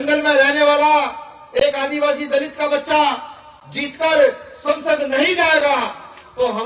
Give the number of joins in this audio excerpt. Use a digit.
0